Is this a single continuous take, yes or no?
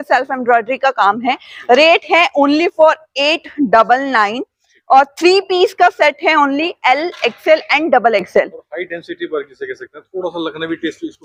yes